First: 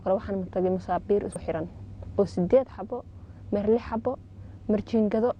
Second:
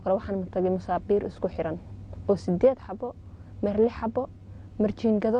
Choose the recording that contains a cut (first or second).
first